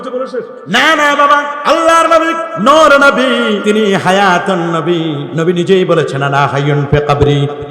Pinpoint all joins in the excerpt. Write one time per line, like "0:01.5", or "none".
0:01.5
0:02.5
0:03.6
0:05.3

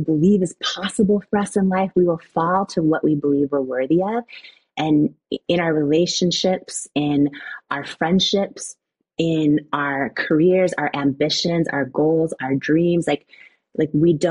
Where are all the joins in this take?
none

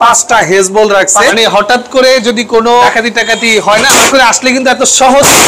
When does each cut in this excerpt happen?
0:01.3
0:02.9
0:04.1

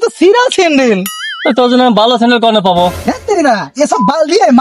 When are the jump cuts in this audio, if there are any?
0:03.0

